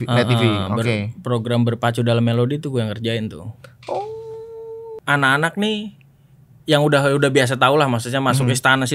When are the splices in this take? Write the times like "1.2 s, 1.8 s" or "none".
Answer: 4.9 s

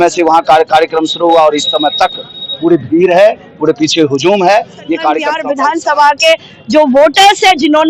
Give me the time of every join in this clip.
5.4 s

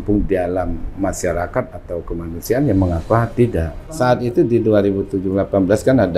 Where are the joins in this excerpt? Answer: 3.8 s

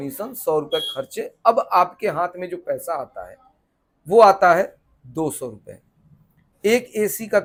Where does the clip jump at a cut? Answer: none

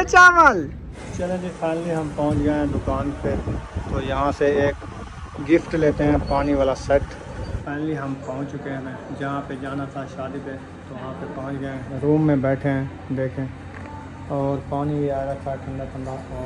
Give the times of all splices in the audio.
1.2 s, 7.6 s, 11.0 s

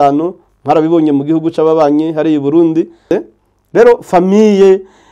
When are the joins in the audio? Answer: 3.0 s

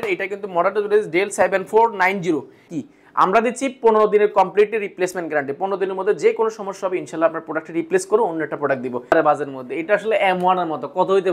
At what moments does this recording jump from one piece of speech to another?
2.6 s, 9.1 s

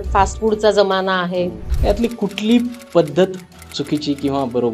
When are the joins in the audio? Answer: 1.7 s

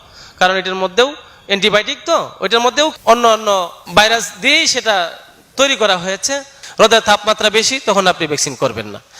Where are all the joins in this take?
3.0 s, 3.8 s, 6.6 s

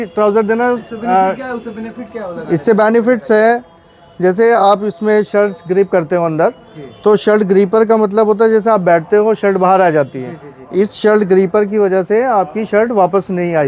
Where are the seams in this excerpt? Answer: none

